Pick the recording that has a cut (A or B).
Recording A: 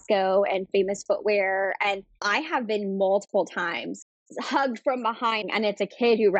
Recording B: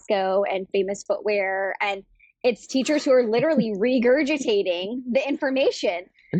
A